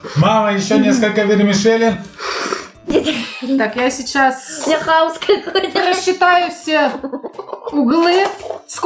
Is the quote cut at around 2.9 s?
yes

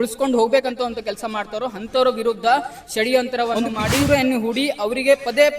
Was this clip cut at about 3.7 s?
yes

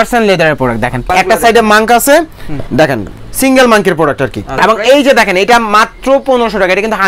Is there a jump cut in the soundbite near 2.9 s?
no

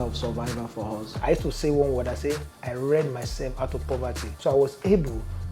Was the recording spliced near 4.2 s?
yes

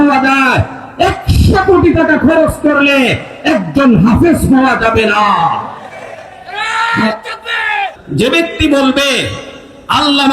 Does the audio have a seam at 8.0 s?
yes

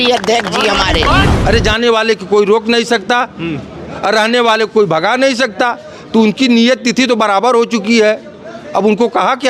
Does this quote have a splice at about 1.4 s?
yes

